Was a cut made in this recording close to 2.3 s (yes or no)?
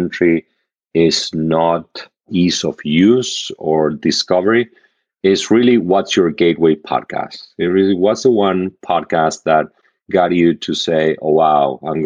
yes